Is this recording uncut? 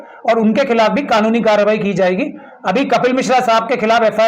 yes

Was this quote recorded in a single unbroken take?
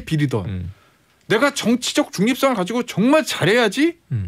yes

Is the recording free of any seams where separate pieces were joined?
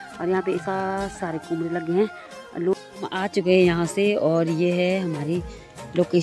no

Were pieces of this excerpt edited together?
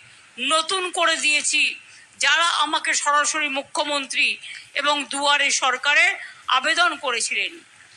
no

